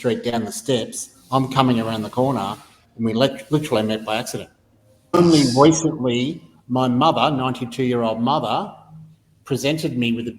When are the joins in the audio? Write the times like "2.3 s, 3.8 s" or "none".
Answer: 5.2 s